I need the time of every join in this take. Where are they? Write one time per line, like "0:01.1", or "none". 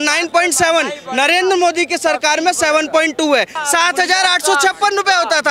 0:03.6